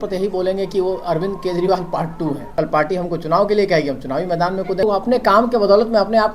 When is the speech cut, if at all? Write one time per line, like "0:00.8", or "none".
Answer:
0:02.4
0:04.8